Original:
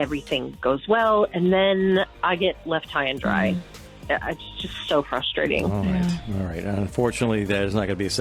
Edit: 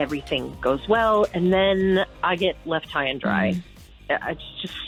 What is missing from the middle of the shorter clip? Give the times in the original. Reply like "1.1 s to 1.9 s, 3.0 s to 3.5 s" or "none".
none

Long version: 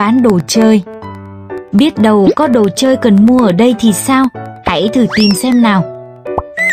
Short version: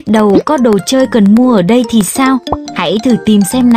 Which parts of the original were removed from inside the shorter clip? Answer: none

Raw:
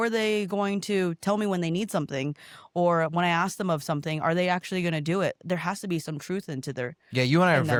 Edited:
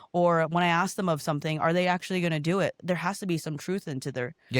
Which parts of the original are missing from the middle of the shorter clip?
none

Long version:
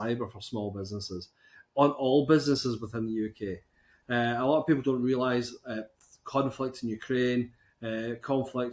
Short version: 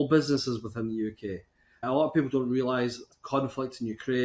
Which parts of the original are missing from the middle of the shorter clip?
4.0 s to 4.4 s, 5.6 s to 6.1 s

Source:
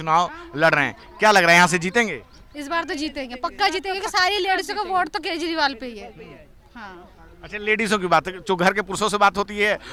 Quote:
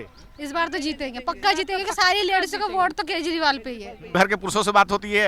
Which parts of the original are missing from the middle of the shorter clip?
6.3 s to 8.6 s

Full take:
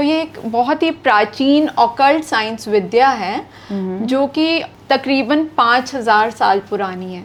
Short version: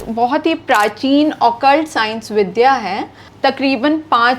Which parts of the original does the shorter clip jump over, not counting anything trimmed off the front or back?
3.6 s to 4.7 s

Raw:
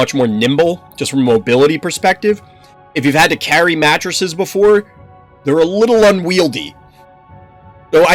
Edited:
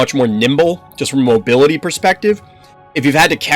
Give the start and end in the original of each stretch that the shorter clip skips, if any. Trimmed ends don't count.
none

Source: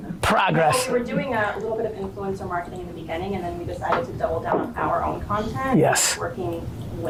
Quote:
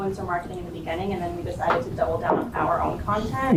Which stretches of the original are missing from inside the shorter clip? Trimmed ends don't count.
none

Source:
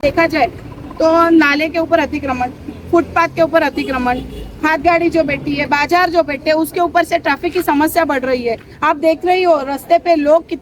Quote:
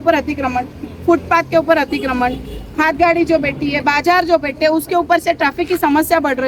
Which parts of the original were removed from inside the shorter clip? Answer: none

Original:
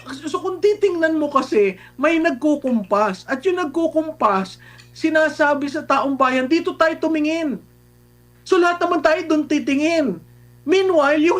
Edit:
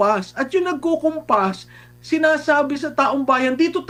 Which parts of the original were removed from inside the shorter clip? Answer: none

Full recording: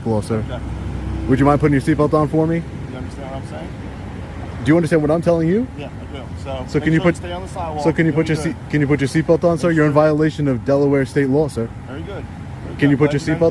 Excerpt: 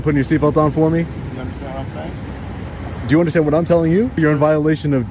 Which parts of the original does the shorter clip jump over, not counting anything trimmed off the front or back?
5.8 s to 9.7 s

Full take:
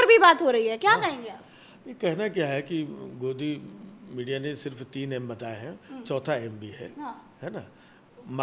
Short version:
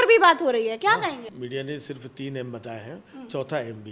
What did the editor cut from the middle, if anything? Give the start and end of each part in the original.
1.3 s to 4.0 s

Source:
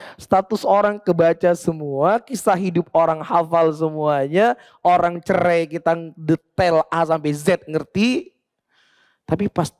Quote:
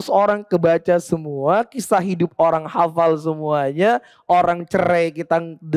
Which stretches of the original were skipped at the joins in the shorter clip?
none

